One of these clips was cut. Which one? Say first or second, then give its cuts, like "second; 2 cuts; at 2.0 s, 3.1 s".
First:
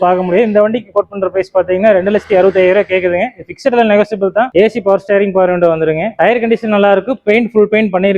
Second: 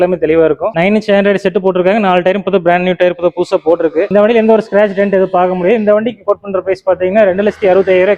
first; 2 cuts; at 4.5 s, 6.1 s